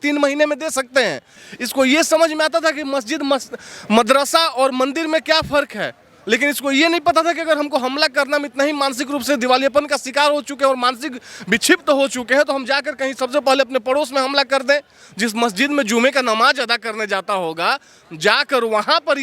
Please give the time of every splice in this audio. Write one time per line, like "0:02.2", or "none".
0:01.4

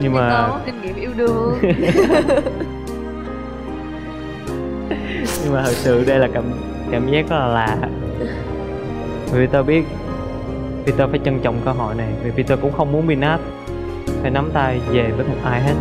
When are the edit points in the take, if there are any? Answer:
none

